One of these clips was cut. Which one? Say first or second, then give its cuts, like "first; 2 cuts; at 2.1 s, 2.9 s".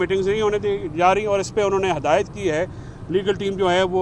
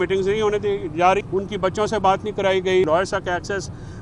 second; 2 cuts; at 1.2 s, 2.9 s